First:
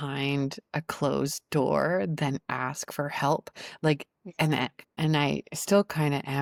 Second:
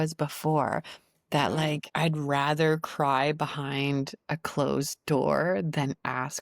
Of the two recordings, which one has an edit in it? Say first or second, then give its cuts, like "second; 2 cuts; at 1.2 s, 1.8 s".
second; 1 cut; at 1.9 s